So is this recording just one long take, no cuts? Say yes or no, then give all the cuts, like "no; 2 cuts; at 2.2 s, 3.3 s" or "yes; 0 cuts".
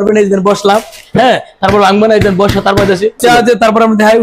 no; 1 cut; at 3.2 s